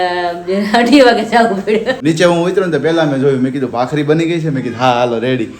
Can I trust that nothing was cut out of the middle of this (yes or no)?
no